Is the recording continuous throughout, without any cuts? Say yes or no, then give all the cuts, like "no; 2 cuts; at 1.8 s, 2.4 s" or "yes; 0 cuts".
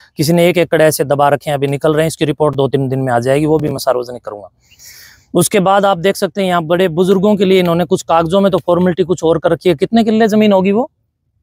yes; 0 cuts